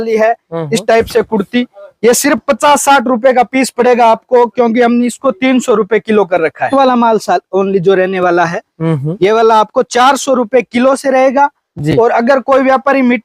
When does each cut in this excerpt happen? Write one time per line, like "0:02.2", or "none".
0:06.7